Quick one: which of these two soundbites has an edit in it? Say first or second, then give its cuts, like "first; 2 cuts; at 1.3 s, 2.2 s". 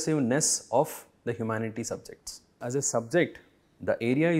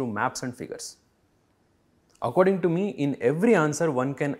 first; 1 cut; at 2.6 s